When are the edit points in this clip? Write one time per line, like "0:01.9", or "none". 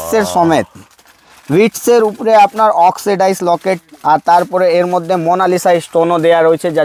none